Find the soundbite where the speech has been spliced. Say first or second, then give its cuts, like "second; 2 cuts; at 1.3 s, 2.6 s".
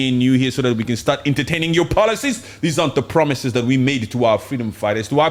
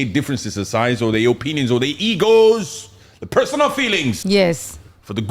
second; 1 cut; at 4.2 s